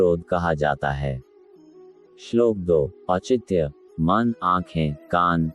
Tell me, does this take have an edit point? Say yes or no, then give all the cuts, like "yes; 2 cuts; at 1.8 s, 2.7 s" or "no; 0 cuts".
yes; 1 cut; at 3.0 s